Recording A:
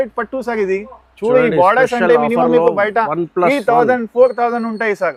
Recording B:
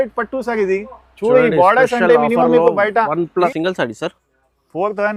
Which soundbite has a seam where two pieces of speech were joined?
B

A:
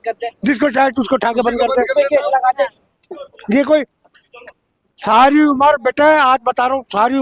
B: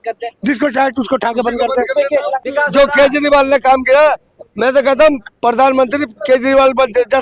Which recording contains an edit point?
B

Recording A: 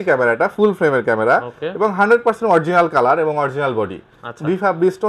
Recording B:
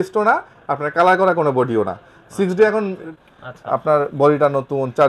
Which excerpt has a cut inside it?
B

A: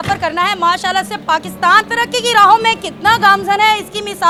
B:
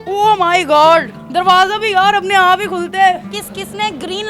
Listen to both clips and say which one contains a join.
B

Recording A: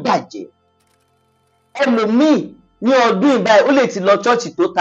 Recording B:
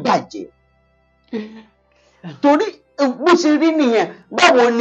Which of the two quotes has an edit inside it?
A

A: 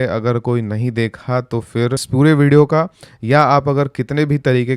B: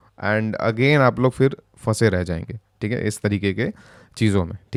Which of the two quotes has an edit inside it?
A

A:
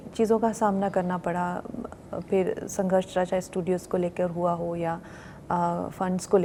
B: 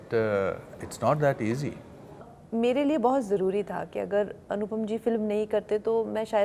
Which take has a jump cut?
B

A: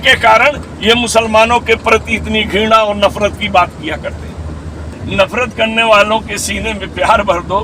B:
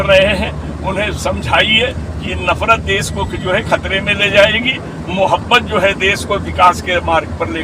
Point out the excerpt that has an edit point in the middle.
A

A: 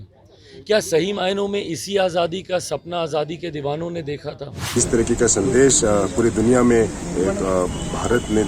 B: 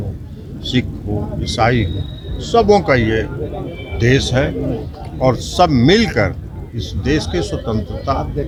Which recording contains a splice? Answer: A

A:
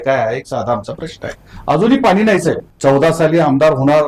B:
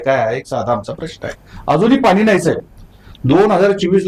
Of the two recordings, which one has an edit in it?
A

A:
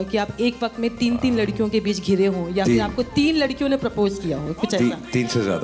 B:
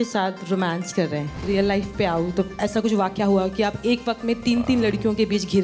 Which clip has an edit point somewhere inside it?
B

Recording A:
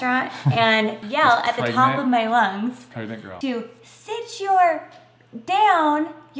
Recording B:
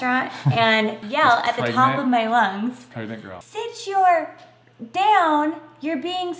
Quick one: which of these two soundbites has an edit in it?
B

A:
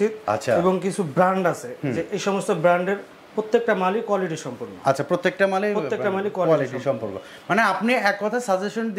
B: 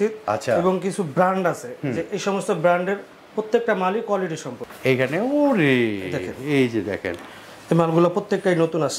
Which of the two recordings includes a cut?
B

